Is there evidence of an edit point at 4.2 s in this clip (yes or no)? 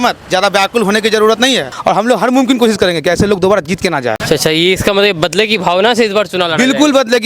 yes